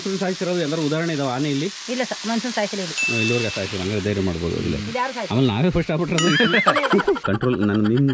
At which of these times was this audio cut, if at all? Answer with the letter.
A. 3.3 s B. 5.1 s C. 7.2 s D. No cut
C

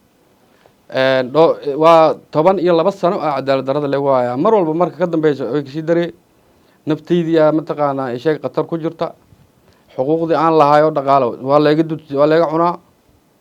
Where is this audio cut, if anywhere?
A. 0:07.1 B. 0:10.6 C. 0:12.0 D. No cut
D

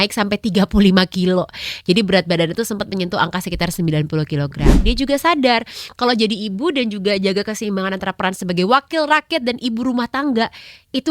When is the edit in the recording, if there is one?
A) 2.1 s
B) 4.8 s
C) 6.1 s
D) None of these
B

